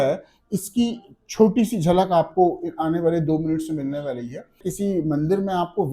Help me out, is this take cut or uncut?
cut